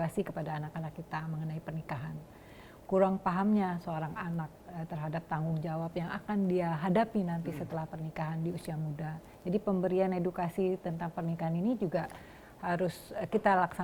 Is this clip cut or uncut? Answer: uncut